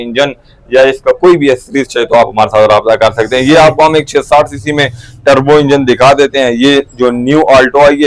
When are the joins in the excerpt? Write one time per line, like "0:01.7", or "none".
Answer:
none